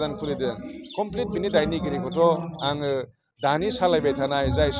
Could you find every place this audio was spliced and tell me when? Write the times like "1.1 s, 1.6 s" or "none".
none